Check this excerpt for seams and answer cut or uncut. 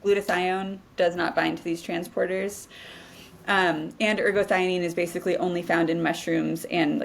uncut